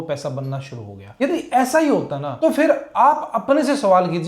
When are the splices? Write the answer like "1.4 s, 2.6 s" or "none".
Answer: 1.0 s, 2.2 s